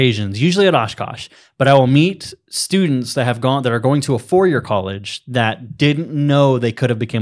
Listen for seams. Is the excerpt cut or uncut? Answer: uncut